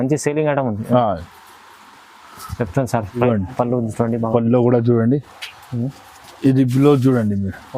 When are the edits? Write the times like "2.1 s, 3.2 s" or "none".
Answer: 3.2 s